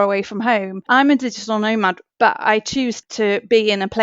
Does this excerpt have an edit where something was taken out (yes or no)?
yes